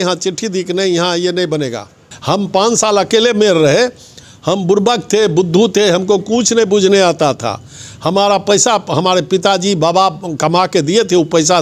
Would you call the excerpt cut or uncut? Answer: cut